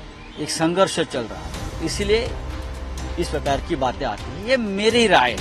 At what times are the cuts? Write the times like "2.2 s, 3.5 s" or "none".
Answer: none